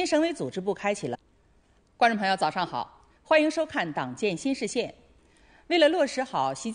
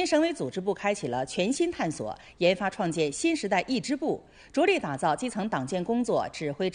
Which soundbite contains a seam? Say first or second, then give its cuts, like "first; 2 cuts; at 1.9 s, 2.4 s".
second; 1 cut; at 1.1 s